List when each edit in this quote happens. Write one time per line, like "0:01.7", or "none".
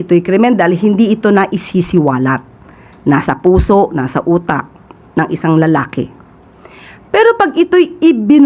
none

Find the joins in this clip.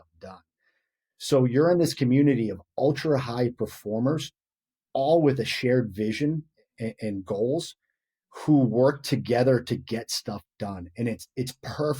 none

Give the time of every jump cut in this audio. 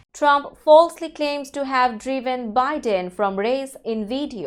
none

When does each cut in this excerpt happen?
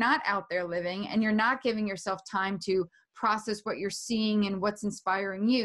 none

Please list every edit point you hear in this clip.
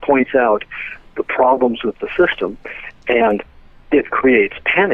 none

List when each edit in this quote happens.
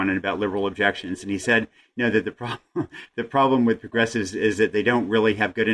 none

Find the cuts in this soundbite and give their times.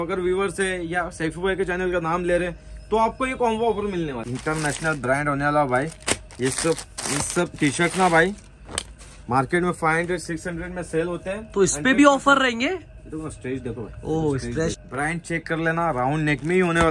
0:04.2
0:14.8

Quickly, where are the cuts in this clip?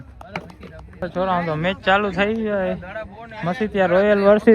0:01.0

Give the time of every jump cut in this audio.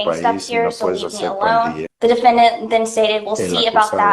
0:01.8

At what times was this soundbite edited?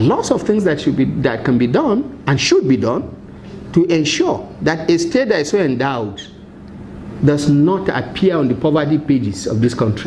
none

